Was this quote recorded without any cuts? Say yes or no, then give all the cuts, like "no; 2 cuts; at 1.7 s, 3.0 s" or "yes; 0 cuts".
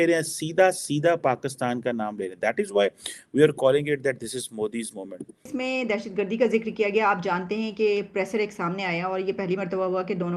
no; 1 cut; at 5.5 s